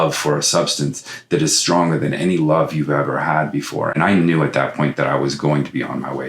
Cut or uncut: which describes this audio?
cut